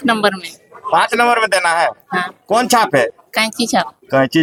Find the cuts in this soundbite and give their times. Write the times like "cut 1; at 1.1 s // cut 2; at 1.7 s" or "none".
none